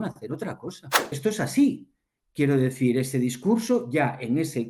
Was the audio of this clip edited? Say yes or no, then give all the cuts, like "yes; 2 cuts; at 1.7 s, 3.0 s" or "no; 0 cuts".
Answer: yes; 1 cut; at 1.2 s